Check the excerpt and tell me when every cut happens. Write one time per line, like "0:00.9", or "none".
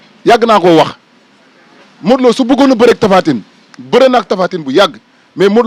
none